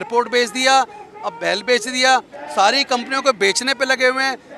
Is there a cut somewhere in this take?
no; 0 cuts

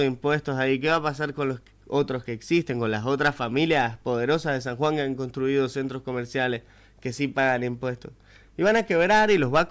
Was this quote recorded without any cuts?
yes; 0 cuts

